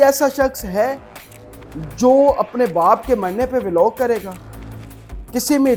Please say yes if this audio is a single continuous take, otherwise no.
yes